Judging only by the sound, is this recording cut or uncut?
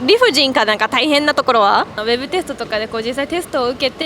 cut